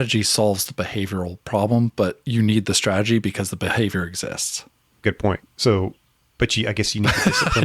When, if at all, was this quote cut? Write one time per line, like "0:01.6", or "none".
none